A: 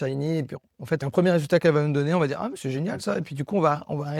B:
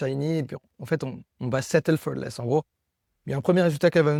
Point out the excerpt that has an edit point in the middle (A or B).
A